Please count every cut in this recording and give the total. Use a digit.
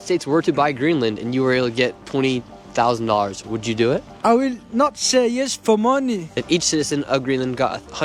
1